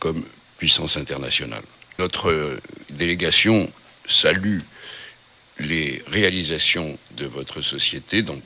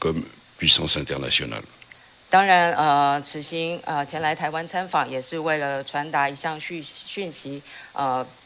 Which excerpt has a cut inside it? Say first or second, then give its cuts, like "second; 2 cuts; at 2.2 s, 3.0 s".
first; 1 cut; at 2.0 s